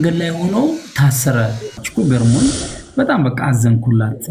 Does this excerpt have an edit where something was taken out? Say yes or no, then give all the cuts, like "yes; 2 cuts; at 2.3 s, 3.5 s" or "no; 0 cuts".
yes; 1 cut; at 1.8 s